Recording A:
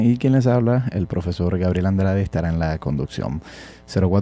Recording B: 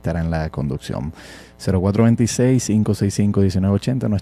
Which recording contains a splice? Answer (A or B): A